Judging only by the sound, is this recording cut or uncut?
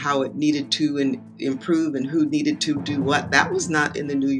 uncut